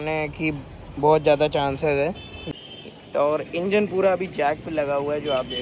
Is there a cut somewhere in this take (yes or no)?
yes